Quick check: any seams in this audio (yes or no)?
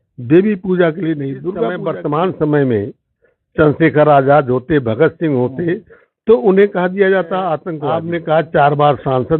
yes